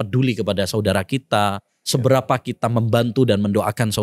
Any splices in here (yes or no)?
no